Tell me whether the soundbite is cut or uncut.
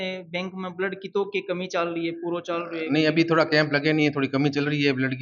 uncut